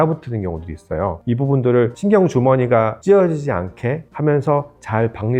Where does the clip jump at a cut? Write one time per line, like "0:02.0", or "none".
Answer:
0:01.2
0:02.0
0:03.0
0:04.1